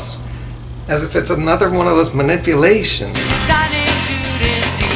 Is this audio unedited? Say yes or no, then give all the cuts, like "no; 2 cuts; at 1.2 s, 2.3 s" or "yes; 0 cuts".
no; 1 cut; at 3.2 s